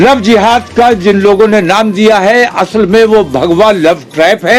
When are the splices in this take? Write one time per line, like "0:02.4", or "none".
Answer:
none